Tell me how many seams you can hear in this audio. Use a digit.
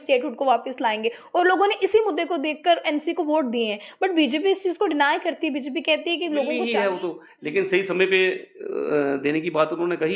1